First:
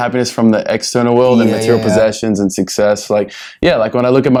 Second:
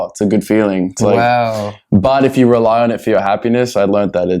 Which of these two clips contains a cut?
second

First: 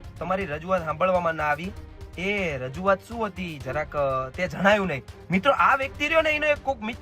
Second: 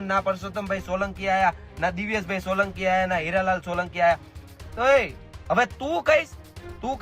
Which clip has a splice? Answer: first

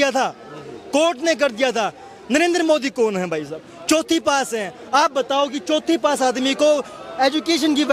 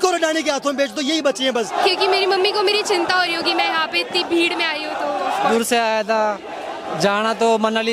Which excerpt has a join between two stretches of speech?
second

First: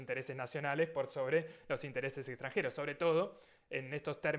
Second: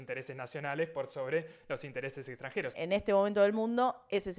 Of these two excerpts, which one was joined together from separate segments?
second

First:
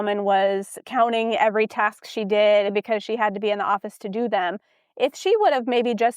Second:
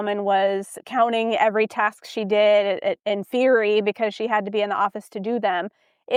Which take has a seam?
first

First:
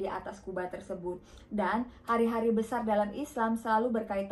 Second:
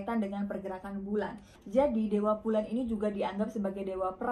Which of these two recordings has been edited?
second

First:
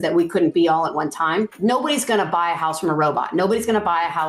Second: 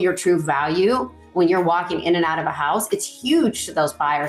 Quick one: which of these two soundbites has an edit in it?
first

